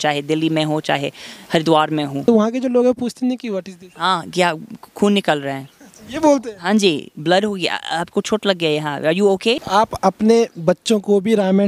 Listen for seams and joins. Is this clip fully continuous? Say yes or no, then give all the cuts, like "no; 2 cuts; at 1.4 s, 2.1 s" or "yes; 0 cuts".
no; 2 cuts; at 2.3 s, 9.6 s